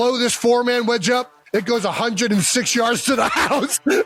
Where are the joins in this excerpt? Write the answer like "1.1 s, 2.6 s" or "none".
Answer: none